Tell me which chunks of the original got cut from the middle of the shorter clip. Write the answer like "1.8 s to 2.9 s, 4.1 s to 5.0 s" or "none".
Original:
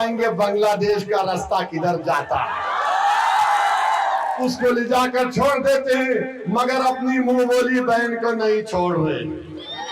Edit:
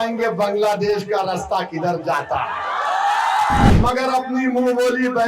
3.7 s to 6.4 s